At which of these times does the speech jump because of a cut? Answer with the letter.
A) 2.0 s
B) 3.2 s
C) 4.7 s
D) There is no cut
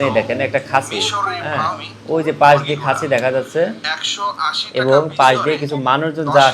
D